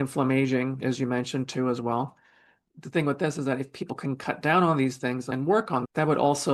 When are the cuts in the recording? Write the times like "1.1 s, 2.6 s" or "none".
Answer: none